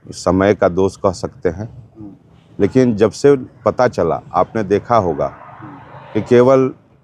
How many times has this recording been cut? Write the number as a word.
zero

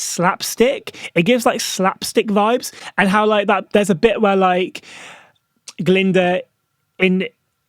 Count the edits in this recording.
zero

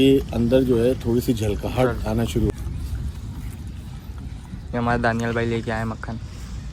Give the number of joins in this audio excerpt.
one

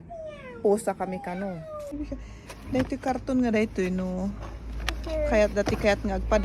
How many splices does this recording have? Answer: one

